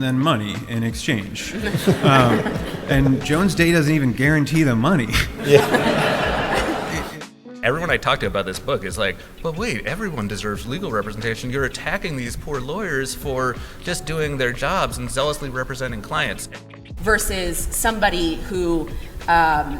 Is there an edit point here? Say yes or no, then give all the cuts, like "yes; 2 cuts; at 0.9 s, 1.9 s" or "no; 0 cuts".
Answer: yes; 2 cuts; at 7.5 s, 16.5 s